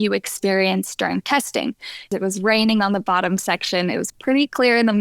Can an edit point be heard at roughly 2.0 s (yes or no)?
yes